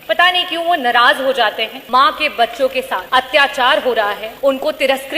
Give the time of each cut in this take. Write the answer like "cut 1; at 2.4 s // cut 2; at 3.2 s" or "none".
cut 1; at 1.7 s // cut 2; at 3.0 s // cut 3; at 4.3 s